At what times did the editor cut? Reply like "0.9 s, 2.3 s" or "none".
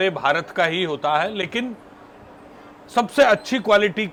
none